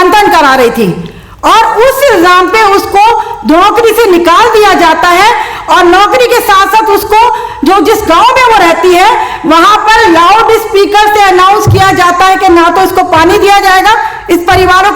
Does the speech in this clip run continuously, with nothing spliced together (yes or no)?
yes